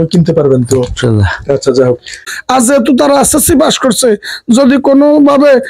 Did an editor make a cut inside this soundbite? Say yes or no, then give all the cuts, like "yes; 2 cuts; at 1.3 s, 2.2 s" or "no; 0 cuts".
yes; 1 cut; at 2.2 s